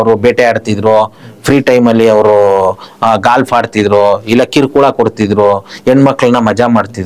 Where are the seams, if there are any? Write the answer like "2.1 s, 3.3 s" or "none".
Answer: none